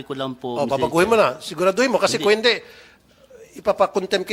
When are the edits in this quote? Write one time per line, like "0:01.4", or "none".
none